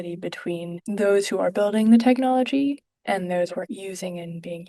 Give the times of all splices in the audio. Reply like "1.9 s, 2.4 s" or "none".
3.7 s